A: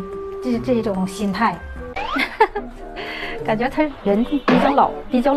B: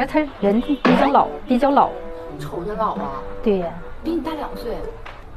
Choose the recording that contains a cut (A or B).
A